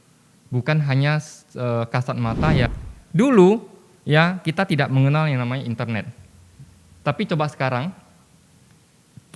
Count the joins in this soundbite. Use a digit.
1